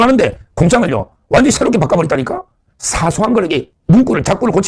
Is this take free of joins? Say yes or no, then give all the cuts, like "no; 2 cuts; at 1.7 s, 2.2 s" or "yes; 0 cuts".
yes; 0 cuts